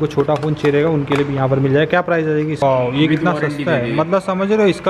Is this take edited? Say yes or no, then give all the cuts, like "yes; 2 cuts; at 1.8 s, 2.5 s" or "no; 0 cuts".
yes; 1 cut; at 2.6 s